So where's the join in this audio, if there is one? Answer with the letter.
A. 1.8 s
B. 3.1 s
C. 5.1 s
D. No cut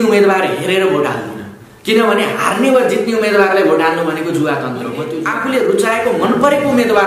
C